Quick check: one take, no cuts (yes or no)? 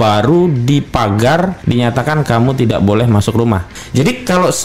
no